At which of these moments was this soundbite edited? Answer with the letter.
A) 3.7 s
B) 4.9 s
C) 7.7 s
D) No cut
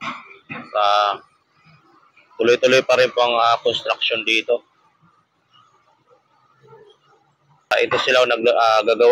C